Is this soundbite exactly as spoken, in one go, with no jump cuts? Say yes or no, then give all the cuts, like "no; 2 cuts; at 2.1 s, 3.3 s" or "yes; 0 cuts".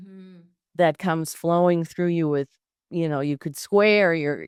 yes; 0 cuts